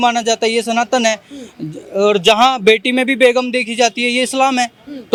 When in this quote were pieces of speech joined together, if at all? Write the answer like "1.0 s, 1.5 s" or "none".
none